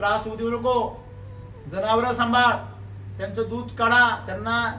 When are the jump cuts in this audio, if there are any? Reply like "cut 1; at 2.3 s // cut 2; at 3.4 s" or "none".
none